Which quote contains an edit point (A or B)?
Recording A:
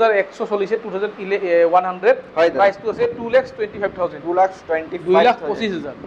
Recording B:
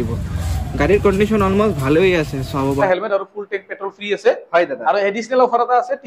B